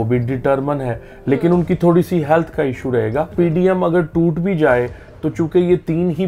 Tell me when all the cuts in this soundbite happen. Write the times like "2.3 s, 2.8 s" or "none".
3.3 s